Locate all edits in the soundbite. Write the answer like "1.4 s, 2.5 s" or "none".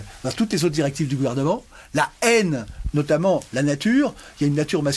none